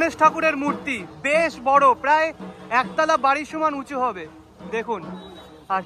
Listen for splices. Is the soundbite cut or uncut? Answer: uncut